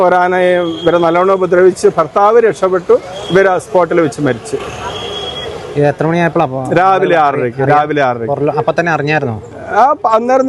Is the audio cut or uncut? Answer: uncut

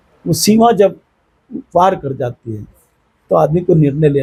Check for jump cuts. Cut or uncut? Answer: uncut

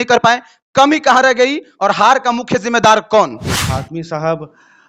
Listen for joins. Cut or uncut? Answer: cut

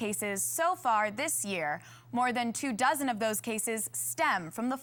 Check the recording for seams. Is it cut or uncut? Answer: uncut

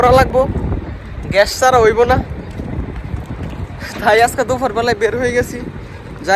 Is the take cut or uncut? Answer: uncut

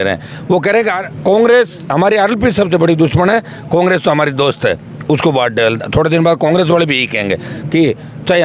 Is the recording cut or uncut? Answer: cut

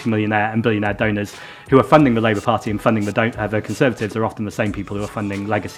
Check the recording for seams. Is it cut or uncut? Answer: uncut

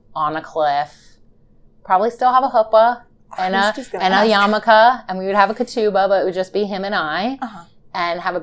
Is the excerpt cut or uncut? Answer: uncut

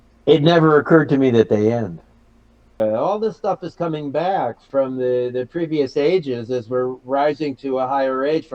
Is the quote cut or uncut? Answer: cut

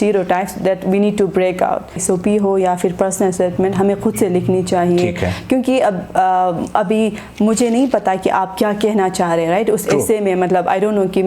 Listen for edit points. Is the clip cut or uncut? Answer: cut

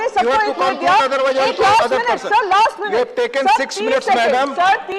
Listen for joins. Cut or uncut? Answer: uncut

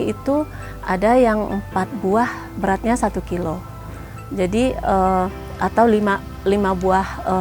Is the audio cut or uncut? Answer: uncut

